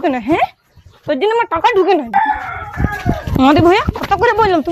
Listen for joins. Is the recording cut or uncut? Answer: cut